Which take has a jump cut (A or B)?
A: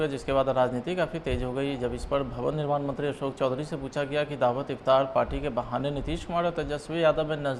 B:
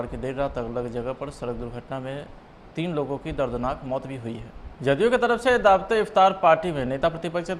B